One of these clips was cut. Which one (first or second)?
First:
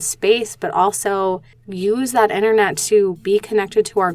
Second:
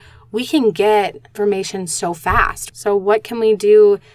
second